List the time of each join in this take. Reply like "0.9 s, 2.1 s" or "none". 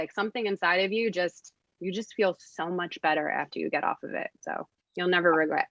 4.8 s